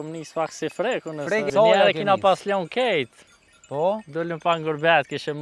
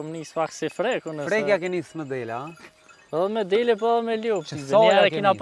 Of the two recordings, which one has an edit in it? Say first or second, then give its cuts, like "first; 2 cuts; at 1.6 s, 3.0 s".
first; 1 cut; at 1.5 s